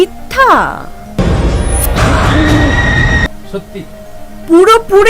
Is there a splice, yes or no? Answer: no